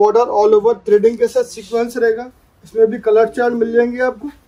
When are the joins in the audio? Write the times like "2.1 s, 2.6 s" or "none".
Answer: none